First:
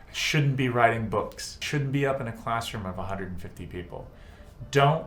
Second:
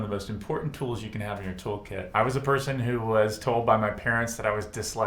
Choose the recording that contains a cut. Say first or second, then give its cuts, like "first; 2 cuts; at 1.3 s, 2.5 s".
second; 1 cut; at 2.0 s